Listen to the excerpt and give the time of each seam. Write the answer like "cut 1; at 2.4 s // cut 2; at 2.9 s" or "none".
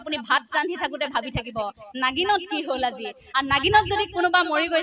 none

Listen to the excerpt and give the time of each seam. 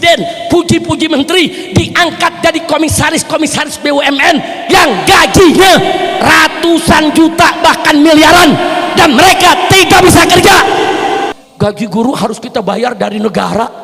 cut 1; at 11.3 s

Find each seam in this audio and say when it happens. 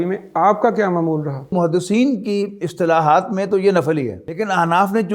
cut 1; at 1.5 s // cut 2; at 4.2 s

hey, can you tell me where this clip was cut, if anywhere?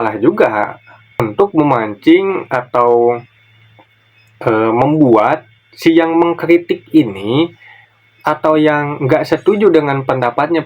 cut 1; at 1.3 s

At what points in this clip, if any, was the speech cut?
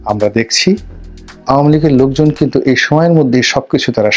none

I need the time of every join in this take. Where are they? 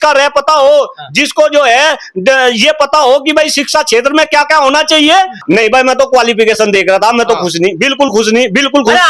cut 1; at 5.4 s

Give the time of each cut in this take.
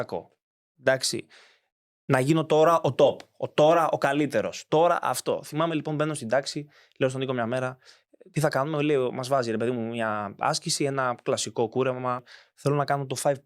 cut 1; at 12.3 s

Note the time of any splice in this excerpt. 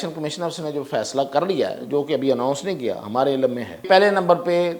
cut 1; at 3.9 s

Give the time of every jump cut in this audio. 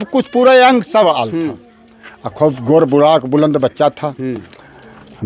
none

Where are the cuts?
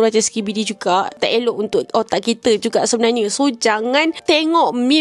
cut 1; at 1.1 s // cut 2; at 4.2 s

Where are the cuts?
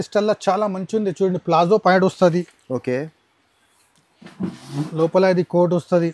none

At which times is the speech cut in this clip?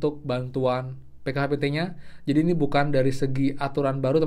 none

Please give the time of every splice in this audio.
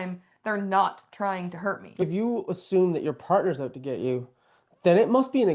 cut 1; at 2.0 s

